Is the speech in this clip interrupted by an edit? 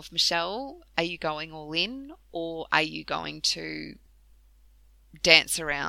no; 0 cuts

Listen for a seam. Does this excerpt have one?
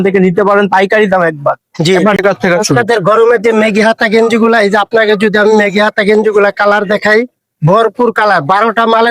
yes; 1 cut; at 2.2 s

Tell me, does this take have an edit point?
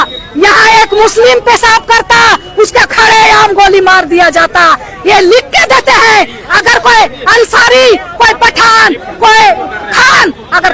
no; 0 cuts

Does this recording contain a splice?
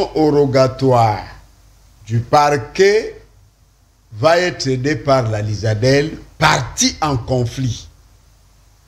no; 0 cuts

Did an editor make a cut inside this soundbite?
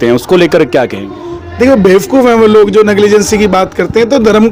no; 0 cuts

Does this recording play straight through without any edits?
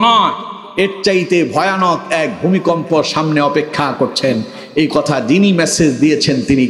yes; 0 cuts

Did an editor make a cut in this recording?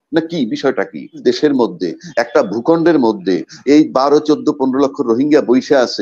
yes; 1 cut; at 1.2 s

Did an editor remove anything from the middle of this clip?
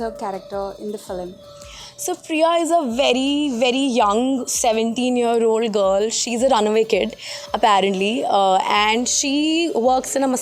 no; 0 cuts

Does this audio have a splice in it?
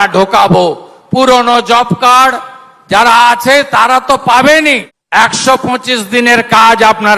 yes; 1 cut; at 4.9 s

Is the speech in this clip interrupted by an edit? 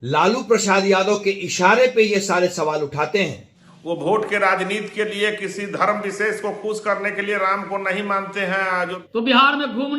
yes; 2 cuts; at 4.0 s, 9.0 s

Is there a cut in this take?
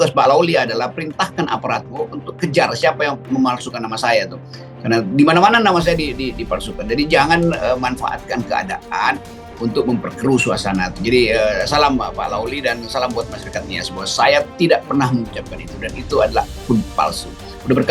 no; 0 cuts

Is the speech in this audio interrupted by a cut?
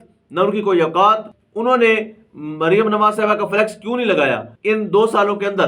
yes; 2 cuts; at 1.3 s, 4.5 s

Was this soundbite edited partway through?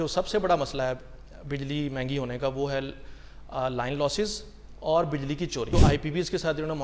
yes; 1 cut; at 5.7 s

